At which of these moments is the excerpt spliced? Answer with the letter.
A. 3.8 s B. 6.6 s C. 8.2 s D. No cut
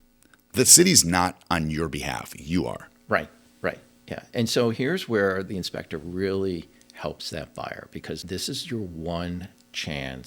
C